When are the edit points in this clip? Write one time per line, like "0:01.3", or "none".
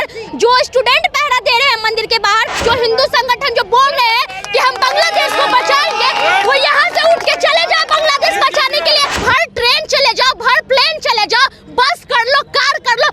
0:02.6
0:09.1